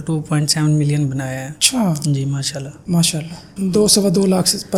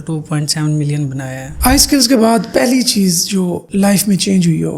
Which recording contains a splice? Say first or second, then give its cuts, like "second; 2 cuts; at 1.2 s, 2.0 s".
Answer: second; 1 cut; at 1.5 s